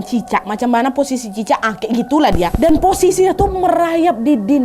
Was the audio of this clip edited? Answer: yes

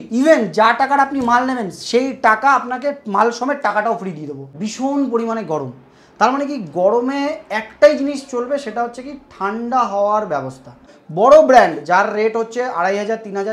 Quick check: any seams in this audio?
yes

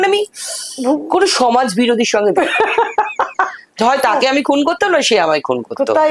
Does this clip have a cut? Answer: no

